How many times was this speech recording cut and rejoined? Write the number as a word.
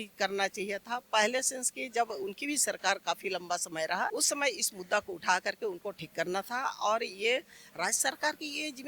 one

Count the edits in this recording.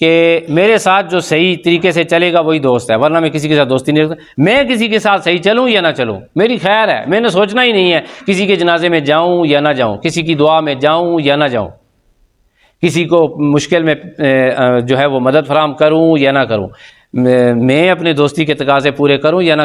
zero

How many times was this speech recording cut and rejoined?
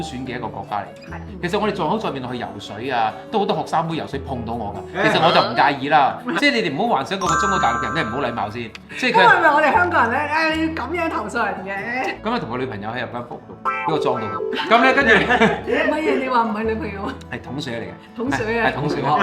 three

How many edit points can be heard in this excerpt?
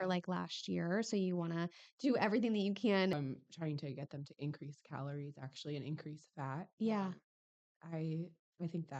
one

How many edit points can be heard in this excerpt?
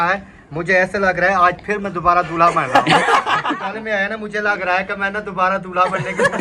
one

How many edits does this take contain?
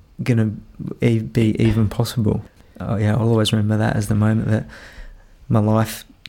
one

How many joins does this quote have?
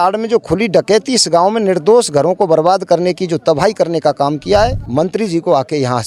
one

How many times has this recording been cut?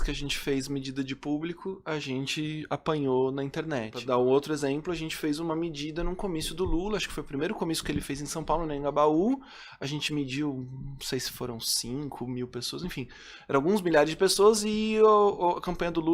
one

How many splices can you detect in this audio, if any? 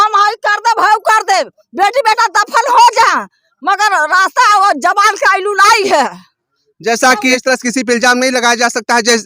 one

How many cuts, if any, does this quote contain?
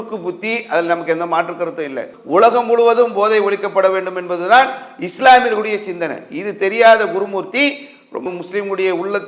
two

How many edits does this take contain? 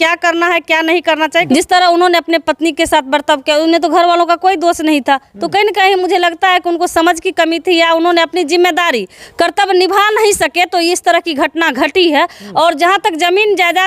two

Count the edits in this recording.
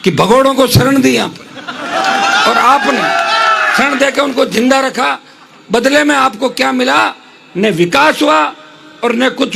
zero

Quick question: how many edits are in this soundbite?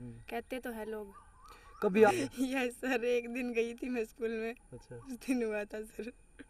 one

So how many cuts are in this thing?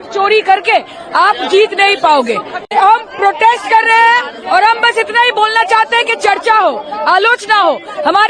one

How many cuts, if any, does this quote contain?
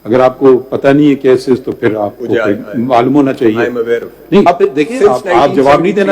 one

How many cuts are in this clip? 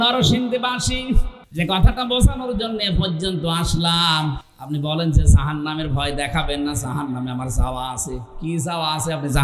one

